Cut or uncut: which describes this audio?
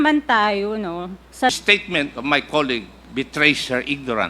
cut